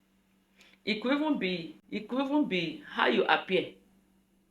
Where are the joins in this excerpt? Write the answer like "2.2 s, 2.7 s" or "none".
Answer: 1.7 s